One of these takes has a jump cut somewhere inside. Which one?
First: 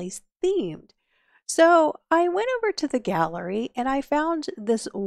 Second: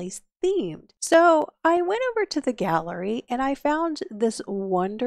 second; 1 cut; at 1.1 s

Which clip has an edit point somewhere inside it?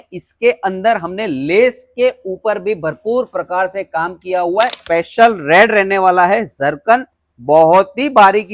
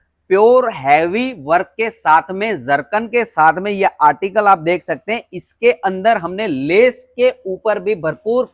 first; 1 cut; at 4.8 s

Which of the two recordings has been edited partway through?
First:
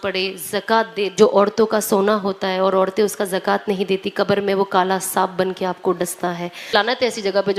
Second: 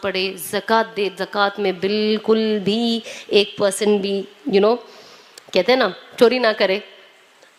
first; 2 cuts; at 1.1 s, 6.7 s

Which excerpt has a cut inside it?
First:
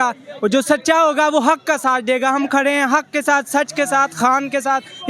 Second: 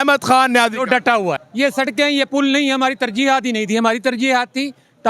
second; 1 cut; at 1.5 s

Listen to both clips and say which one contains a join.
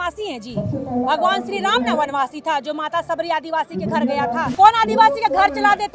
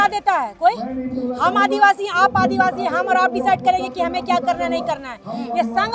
first; 1 cut; at 4.5 s

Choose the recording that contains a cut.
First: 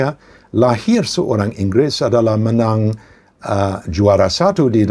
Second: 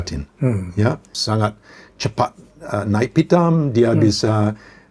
second; 1 cut; at 1.2 s

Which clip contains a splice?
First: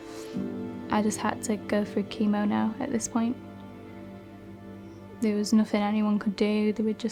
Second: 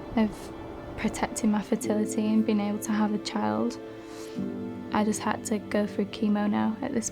second; 1 cut; at 0.9 s

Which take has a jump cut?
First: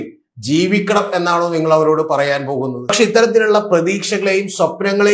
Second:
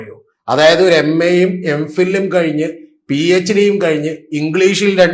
first; 1 cut; at 2.9 s

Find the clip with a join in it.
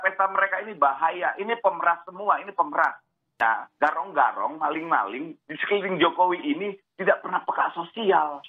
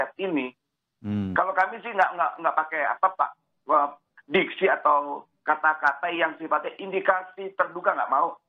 first; 1 cut; at 3.3 s

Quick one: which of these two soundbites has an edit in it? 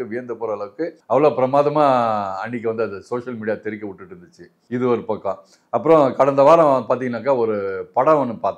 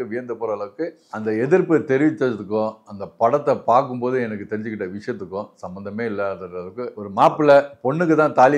second; 2 cuts; at 1.0 s, 7.0 s

